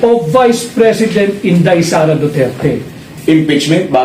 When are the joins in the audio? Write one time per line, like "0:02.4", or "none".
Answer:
0:03.0